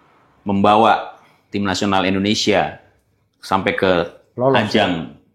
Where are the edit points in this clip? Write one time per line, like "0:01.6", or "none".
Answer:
none